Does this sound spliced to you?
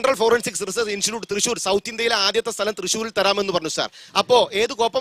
no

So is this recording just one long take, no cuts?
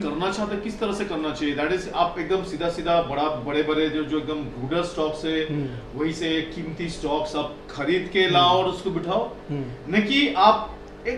yes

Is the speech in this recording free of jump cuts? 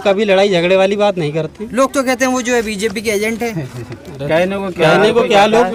yes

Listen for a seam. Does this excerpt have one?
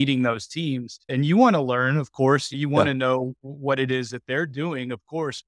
yes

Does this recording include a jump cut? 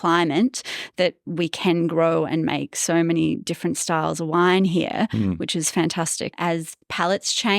yes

